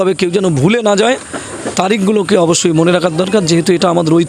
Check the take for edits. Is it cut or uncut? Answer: uncut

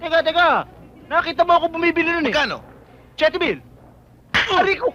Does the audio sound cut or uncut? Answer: uncut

